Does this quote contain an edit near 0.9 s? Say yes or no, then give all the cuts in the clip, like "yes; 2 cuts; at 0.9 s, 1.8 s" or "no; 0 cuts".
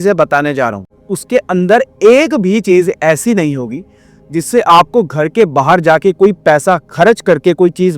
yes; 1 cut; at 0.9 s